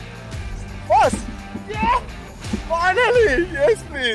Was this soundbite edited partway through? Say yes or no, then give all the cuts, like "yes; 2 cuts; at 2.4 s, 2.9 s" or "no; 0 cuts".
no; 0 cuts